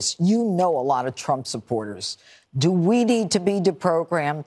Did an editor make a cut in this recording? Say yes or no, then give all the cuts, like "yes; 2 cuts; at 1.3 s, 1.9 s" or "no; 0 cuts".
no; 0 cuts